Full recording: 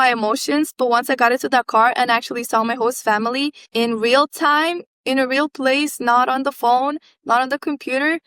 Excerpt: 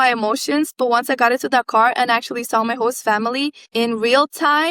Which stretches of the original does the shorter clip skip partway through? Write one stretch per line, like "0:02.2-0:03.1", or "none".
none